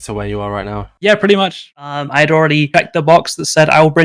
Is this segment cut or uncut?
cut